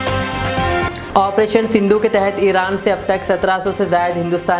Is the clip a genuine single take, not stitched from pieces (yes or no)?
no